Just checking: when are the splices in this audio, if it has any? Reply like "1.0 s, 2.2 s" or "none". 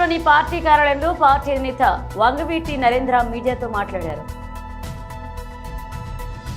none